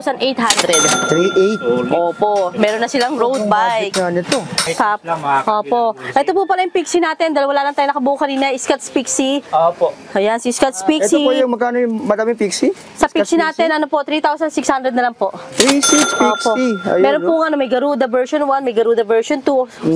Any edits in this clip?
yes; 1 cut; at 4.7 s

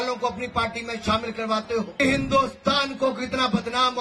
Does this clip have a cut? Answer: yes; 1 cut; at 1.9 s

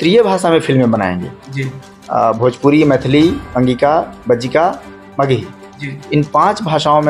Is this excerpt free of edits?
yes; 0 cuts

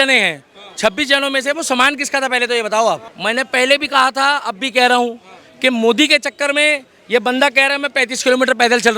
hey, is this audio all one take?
no; 1 cut; at 3.1 s

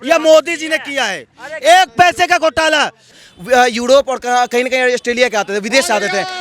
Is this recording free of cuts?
no; 1 cut; at 3.1 s

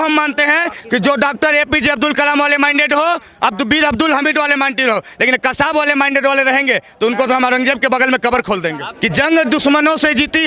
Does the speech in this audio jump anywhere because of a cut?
yes; 1 cut; at 8.8 s

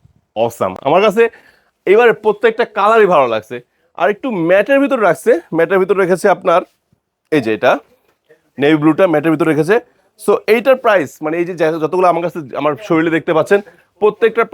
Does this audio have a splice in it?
no; 0 cuts

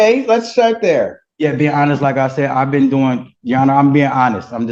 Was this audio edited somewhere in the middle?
no; 0 cuts

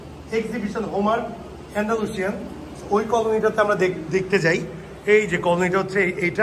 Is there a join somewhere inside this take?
no; 0 cuts

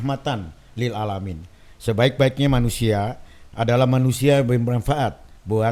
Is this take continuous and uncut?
yes; 0 cuts

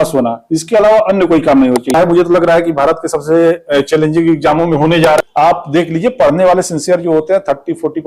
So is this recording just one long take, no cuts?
no; 2 cuts; at 1.9 s, 5.2 s

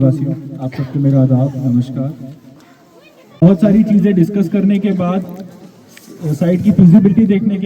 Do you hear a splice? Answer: yes; 1 cut; at 3.3 s

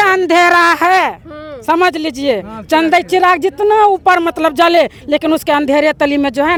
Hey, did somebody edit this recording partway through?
no; 0 cuts

